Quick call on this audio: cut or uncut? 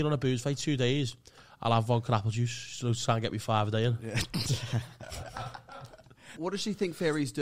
cut